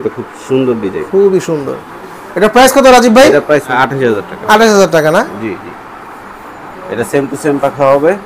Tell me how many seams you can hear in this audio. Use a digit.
0